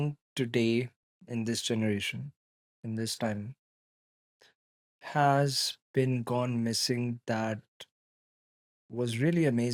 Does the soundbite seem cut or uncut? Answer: uncut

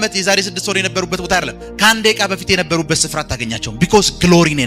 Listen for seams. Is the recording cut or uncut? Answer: uncut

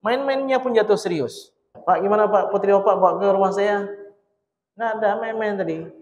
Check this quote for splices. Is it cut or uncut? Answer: cut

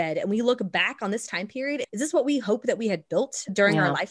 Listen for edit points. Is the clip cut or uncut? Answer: cut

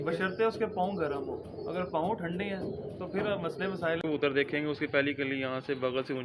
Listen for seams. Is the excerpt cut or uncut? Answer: cut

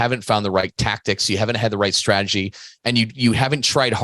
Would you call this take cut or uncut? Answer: uncut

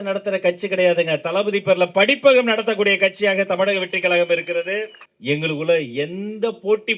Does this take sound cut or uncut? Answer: cut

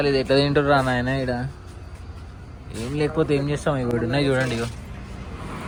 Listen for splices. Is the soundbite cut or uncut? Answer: uncut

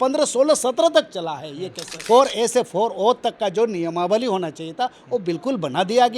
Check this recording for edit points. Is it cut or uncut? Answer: cut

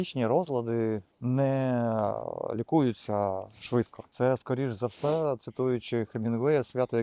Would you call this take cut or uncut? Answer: cut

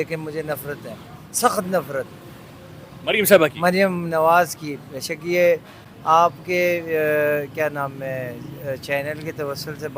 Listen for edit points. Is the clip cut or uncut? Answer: uncut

